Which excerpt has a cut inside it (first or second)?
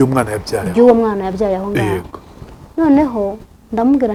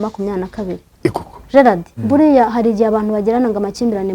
second